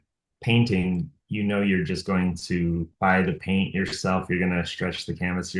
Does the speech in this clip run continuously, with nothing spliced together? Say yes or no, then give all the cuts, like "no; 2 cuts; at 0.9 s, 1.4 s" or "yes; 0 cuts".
no; 1 cut; at 2.9 s